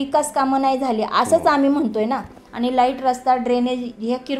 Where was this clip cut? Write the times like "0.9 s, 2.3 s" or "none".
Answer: 2.4 s